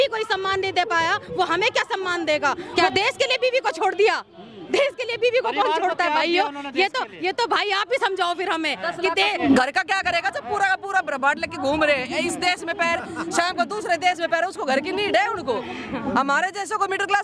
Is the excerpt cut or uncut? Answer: cut